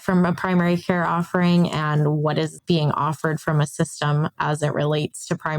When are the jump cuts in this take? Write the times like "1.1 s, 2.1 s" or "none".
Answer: 2.6 s